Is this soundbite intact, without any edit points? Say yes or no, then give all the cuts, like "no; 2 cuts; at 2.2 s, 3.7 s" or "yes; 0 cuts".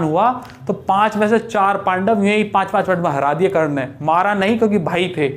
yes; 0 cuts